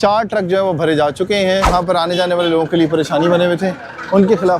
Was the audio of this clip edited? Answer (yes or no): yes